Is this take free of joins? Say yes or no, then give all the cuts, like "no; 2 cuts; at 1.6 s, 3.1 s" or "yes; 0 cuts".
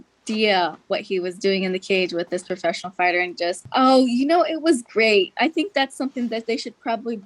no; 1 cut; at 3.6 s